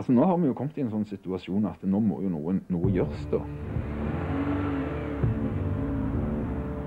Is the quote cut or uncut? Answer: uncut